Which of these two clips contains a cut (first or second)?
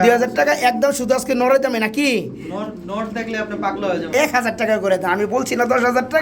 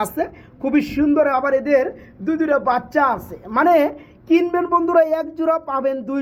first